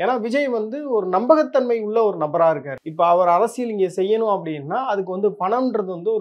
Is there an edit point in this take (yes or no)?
yes